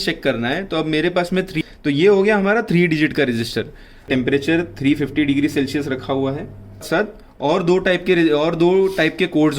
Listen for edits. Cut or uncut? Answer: cut